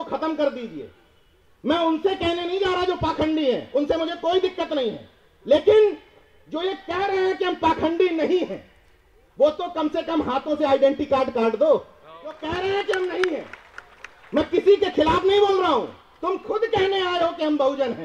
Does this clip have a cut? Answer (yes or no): yes